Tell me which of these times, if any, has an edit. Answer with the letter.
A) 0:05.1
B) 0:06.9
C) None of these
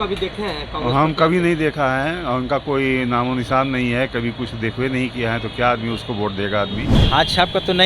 B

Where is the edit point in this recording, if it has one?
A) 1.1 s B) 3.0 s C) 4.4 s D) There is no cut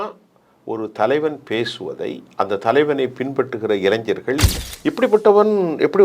C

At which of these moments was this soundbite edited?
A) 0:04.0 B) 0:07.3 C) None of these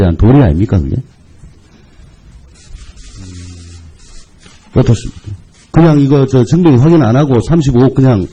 C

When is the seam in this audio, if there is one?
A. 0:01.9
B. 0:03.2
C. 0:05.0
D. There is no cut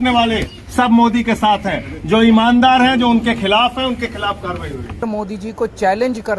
C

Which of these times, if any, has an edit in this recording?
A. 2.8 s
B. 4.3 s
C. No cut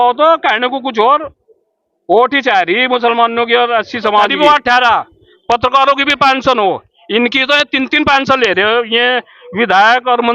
B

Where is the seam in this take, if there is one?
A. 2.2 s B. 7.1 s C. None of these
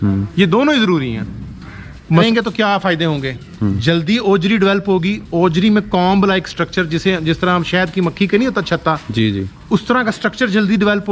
A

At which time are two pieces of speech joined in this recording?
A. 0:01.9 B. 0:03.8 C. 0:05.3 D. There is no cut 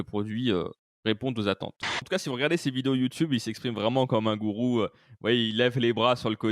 A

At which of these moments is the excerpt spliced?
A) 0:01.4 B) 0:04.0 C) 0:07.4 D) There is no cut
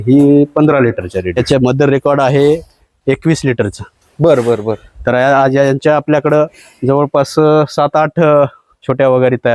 A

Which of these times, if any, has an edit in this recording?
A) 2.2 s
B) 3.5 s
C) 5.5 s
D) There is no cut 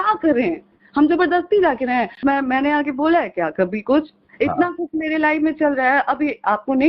A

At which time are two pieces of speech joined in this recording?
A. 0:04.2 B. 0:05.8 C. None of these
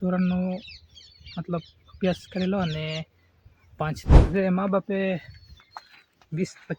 A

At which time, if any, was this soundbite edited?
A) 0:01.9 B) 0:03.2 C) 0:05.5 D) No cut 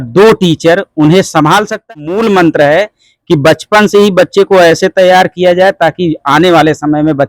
A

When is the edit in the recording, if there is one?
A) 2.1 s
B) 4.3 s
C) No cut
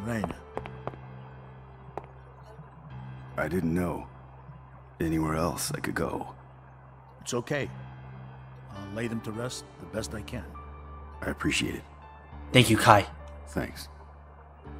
A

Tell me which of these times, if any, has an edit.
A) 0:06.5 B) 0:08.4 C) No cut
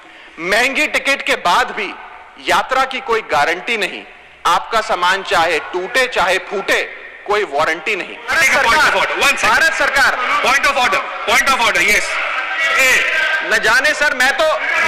B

